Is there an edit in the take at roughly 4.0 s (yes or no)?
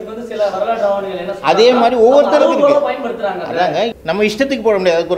yes